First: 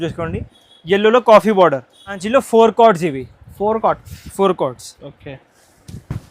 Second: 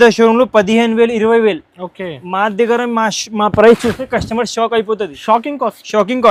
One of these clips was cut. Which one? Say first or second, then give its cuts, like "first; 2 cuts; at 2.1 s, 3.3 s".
first; 1 cut; at 2.2 s